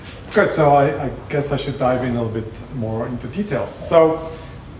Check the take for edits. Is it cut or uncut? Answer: uncut